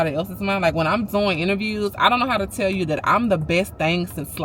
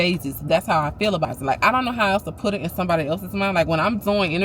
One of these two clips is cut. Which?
second; 1 cut; at 1.3 s

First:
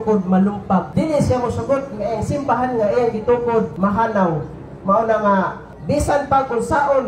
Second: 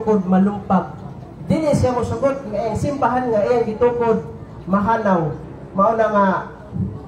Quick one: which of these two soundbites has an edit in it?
first; 3 cuts; at 0.9 s, 3.7 s, 5.7 s

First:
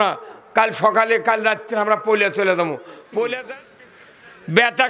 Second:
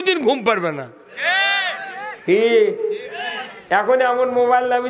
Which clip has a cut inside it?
first; 1 cut; at 3.5 s

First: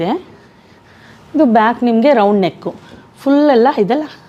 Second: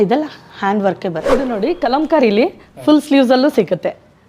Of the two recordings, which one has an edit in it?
second; 1 cut; at 1.5 s

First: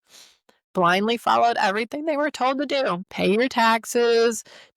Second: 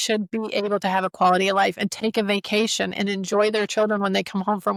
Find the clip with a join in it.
first; 1 cut; at 3.1 s

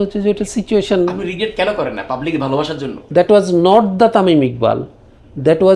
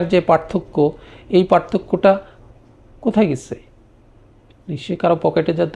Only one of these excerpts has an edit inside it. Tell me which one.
first; 1 cut; at 3.0 s

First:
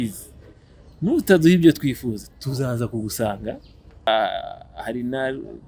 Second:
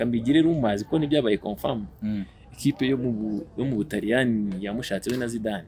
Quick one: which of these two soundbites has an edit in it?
first; 1 cut; at 4.1 s

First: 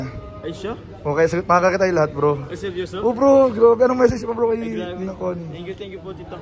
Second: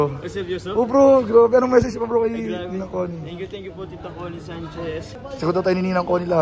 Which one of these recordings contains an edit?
second; 1 cut; at 5.1 s

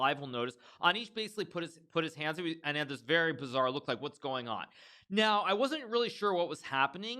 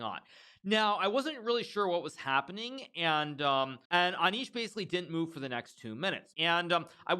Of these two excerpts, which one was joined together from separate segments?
second; 2 cuts; at 3.8 s, 6.3 s

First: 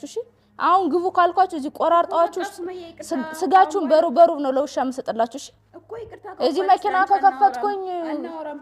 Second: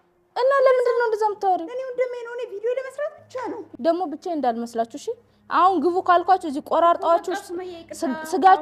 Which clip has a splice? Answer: second; 1 cut; at 3.7 s

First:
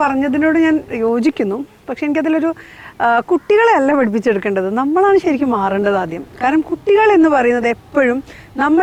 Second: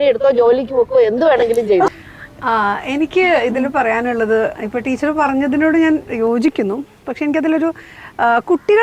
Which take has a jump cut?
second; 1 cut; at 1.9 s

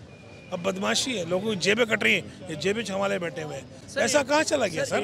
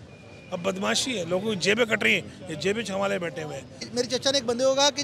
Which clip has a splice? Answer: second; 1 cut; at 3.8 s

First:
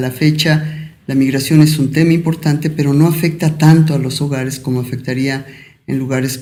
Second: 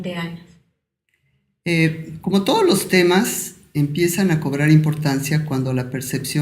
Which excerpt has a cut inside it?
second; 1 cut; at 2.0 s

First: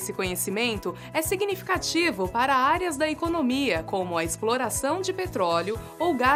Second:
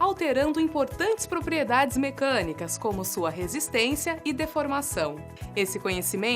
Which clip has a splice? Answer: second; 1 cut; at 3.2 s

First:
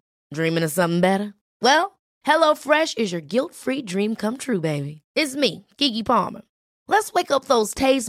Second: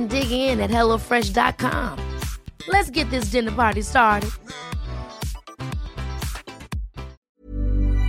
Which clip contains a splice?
second; 1 cut; at 7.2 s

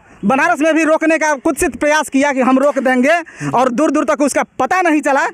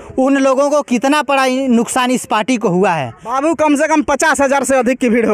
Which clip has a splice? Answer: second; 1 cut; at 3.3 s

